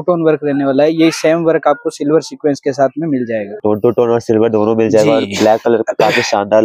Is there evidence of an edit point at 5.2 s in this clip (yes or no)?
no